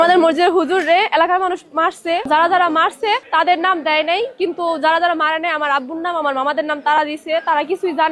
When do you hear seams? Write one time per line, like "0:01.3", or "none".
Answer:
0:02.3
0:03.2